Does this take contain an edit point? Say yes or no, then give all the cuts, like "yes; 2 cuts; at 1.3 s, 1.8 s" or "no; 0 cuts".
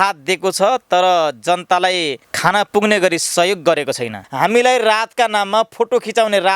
yes; 2 cuts; at 2.2 s, 4.2 s